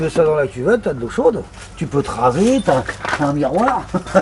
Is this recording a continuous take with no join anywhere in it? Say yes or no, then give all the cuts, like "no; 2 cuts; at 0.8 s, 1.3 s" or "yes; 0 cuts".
yes; 0 cuts